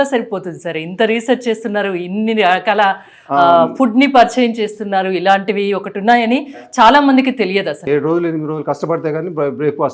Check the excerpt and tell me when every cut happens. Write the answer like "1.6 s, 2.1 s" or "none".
7.8 s